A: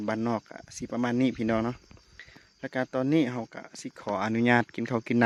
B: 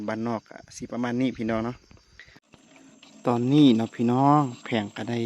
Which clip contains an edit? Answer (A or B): B